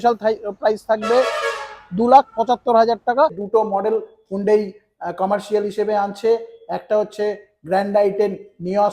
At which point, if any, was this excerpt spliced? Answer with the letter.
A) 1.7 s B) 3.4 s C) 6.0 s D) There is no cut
B